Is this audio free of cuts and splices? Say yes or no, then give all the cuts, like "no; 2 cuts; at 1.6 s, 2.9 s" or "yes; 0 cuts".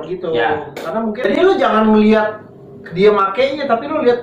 no; 1 cut; at 1.4 s